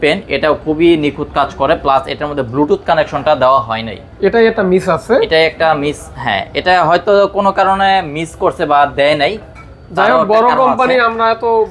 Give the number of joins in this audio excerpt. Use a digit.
0